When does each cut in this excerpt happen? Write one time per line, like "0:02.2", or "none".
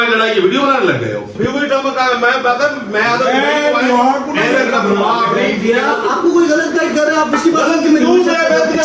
0:01.3